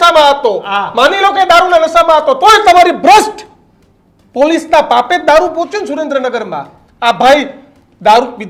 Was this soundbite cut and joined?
no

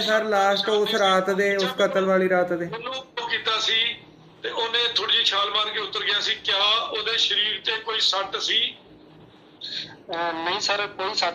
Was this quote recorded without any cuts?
no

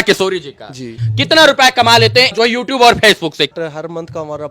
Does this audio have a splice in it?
yes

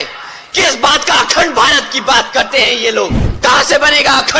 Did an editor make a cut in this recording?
yes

